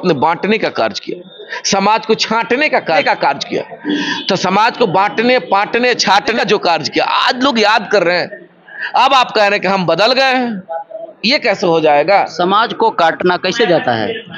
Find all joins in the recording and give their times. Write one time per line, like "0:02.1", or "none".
0:03.0
0:06.4
0:13.2